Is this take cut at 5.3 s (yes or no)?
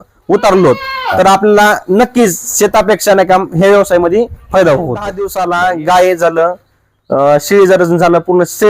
yes